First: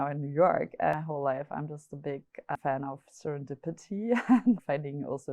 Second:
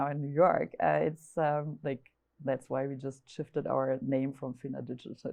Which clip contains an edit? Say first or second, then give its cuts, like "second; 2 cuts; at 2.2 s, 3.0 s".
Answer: first; 3 cuts; at 0.9 s, 2.5 s, 4.6 s